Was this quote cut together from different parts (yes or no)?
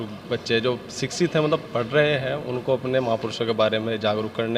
no